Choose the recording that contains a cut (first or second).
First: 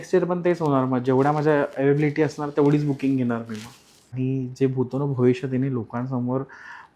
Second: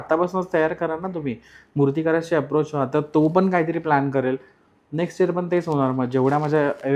first